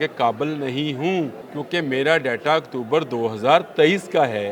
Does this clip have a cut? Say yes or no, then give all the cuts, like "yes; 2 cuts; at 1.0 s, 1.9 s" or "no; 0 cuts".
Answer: yes; 1 cut; at 1.4 s